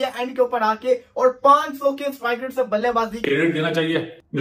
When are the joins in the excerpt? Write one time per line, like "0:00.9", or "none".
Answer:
0:03.2

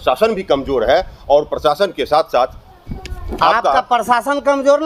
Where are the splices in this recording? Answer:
none

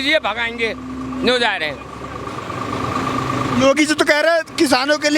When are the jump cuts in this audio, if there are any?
none

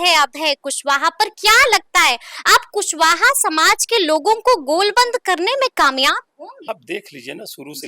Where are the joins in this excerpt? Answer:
0:06.7

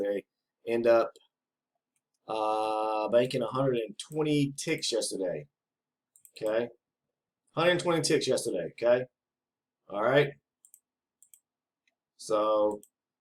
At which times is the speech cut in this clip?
none

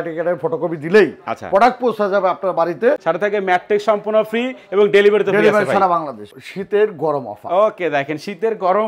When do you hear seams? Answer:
0:03.0
0:06.2

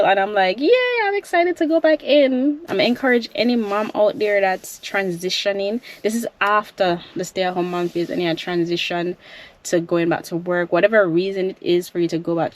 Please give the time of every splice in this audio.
0:02.6

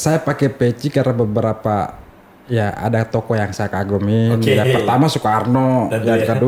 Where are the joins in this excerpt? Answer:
none

